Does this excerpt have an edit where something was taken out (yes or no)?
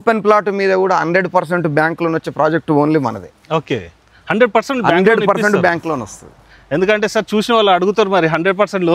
no